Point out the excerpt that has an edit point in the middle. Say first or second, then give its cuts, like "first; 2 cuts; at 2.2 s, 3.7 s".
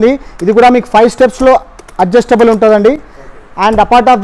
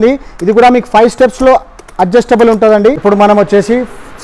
second; 1 cut; at 3.0 s